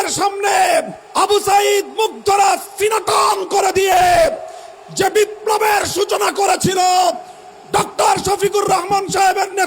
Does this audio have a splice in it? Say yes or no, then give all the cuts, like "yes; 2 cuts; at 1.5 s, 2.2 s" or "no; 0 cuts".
yes; 1 cut; at 1.0 s